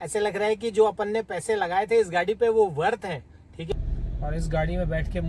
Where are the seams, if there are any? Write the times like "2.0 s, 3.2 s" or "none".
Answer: 3.7 s